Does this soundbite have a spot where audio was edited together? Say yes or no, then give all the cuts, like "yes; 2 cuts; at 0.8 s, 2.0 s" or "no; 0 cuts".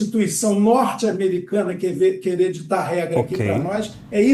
no; 0 cuts